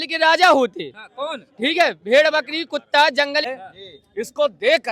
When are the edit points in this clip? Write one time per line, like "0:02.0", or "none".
0:03.5